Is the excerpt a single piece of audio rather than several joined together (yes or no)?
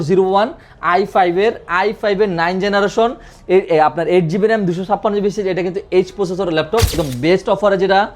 no